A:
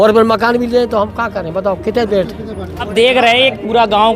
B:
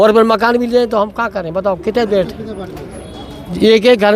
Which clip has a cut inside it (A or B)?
A